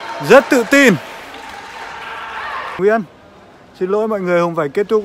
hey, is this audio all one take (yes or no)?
no